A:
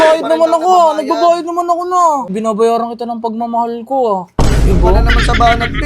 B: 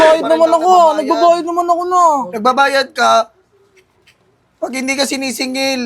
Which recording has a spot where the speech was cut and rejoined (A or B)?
A